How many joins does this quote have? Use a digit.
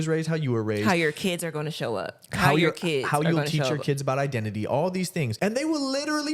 1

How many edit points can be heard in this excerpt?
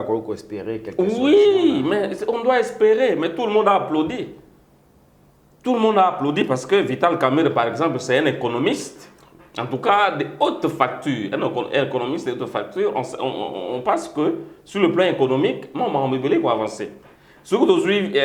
0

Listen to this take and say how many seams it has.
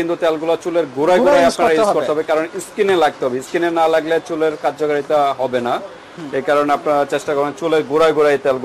0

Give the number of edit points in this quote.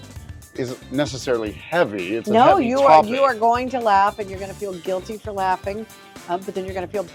0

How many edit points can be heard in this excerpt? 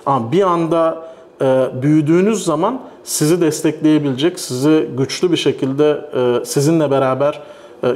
0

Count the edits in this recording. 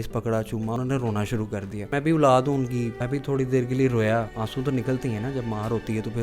4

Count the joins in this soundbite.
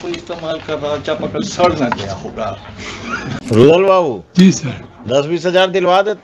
1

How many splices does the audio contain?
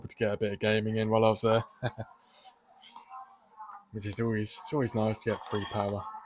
0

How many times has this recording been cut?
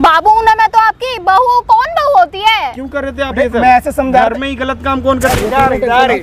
1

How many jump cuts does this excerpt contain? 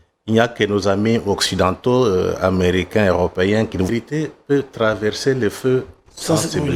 1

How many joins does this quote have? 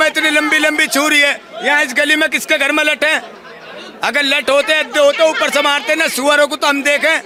0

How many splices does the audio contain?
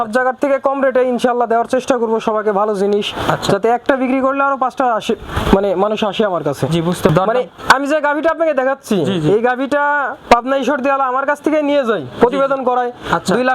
1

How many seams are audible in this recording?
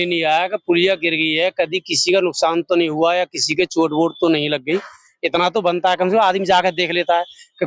0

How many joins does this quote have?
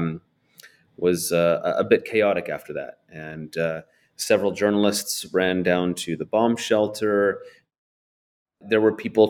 1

